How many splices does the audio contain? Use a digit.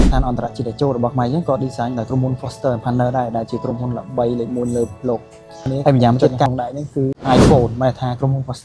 1